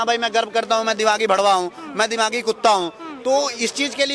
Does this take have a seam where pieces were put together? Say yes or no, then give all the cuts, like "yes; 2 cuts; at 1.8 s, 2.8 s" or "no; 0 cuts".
no; 0 cuts